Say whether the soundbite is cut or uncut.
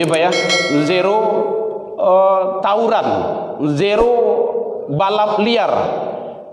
uncut